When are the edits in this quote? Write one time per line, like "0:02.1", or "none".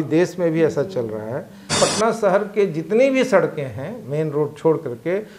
0:01.8